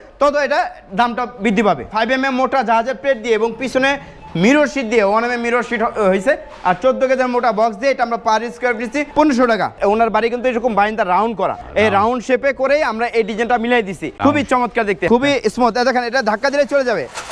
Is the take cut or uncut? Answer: cut